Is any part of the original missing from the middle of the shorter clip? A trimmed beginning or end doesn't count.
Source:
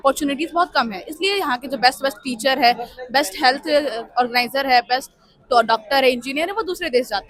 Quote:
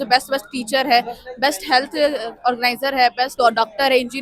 yes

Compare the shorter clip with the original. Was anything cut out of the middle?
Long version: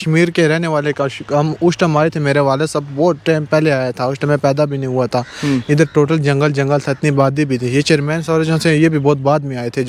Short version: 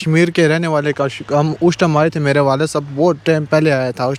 no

